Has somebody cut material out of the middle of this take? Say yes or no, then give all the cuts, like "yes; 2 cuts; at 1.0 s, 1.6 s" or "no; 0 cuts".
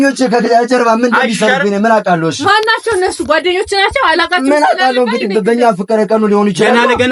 no; 0 cuts